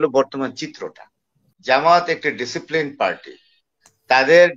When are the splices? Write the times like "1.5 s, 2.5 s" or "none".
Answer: 1.5 s